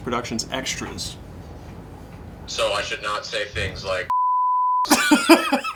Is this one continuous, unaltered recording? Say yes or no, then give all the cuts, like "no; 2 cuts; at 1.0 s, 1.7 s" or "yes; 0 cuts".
yes; 0 cuts